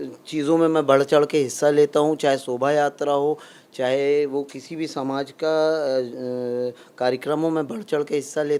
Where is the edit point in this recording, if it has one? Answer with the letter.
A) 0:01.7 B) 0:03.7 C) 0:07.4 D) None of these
D